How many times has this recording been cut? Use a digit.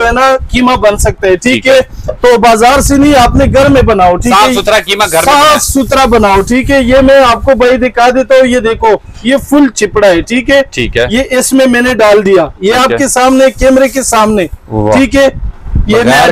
0